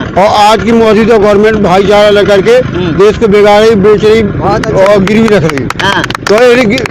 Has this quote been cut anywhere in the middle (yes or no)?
no